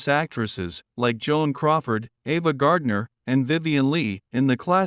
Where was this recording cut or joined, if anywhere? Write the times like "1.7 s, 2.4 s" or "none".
3.1 s